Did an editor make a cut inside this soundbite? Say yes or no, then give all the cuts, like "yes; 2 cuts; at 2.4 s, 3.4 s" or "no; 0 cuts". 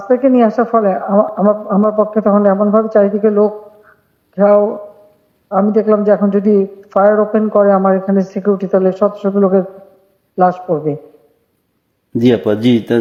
no; 0 cuts